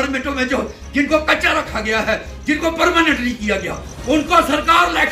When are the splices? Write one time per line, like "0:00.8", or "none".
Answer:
none